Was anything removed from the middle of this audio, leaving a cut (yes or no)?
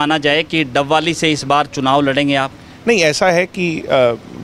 no